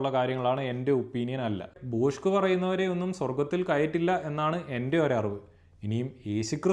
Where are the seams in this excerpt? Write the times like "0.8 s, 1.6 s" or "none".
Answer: 1.7 s